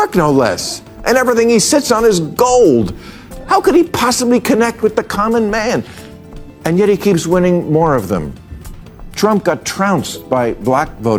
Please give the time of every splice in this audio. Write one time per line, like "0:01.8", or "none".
none